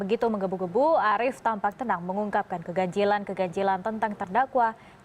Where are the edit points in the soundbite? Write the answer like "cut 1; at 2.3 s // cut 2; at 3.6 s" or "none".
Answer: cut 1; at 3.9 s

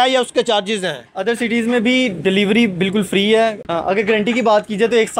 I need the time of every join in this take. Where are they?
cut 1; at 3.6 s

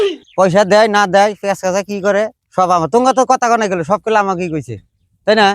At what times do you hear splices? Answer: none

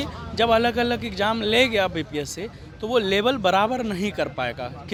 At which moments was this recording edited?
none

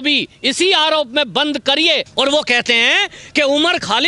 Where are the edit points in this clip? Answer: cut 1; at 2.1 s

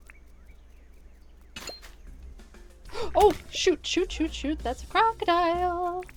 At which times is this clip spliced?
none

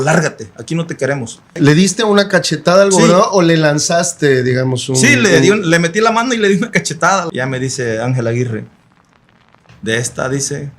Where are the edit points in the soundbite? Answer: cut 1; at 1.5 s // cut 2; at 7.3 s

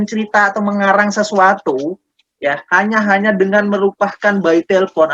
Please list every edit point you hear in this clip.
none

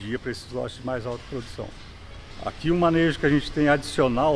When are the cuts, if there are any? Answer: none

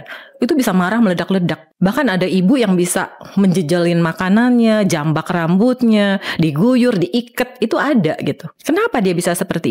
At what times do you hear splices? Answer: cut 1; at 1.6 s // cut 2; at 8.5 s

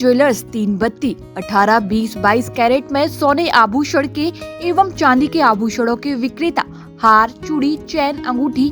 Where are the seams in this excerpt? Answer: none

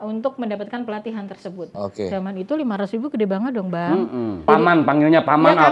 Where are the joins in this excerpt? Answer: cut 1; at 1.7 s // cut 2; at 4.4 s

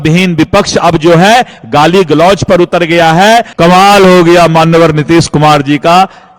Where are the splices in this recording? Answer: cut 1; at 3.5 s

